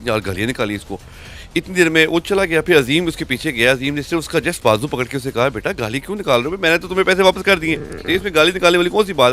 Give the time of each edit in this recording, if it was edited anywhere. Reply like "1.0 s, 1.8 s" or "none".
none